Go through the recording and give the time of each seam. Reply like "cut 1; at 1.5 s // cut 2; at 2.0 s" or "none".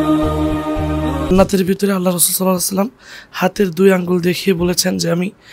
cut 1; at 1.3 s